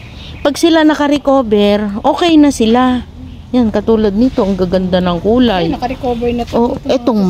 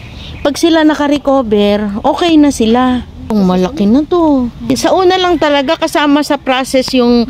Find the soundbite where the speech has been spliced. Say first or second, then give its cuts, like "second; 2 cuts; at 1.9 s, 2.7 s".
second; 2 cuts; at 3.3 s, 4.7 s